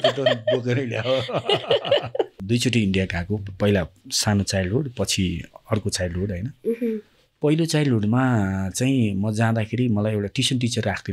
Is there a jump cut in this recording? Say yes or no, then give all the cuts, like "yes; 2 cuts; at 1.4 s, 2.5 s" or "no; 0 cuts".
yes; 1 cut; at 2.3 s